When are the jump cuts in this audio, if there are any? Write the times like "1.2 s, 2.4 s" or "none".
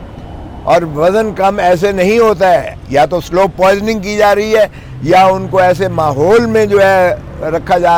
none